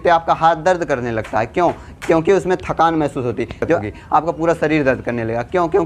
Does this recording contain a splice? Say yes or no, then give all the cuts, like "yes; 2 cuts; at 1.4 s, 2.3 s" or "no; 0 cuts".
yes; 1 cut; at 3.8 s